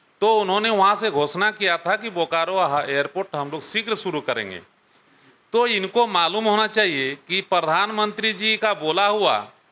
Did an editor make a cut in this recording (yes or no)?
no